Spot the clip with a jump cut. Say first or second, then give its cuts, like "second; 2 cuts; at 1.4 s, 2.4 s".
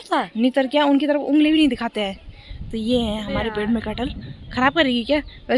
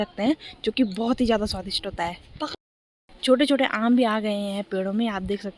second; 1 cut; at 2.7 s